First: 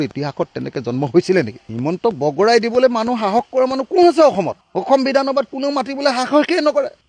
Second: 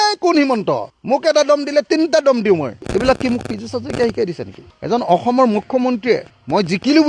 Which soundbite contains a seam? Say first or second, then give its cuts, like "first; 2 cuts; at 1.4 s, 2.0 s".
second; 1 cut; at 4.7 s